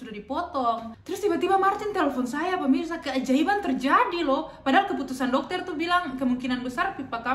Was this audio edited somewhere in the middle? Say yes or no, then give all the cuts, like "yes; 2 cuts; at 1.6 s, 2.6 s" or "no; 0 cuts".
yes; 1 cut; at 0.9 s